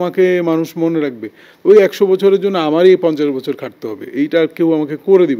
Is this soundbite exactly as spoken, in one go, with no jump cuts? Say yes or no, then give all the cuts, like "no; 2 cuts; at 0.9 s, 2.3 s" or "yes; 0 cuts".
yes; 0 cuts